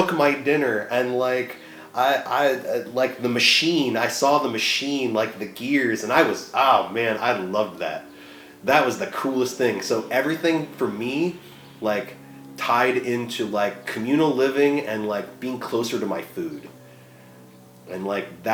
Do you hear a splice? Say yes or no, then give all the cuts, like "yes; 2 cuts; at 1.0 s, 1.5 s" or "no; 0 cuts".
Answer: no; 0 cuts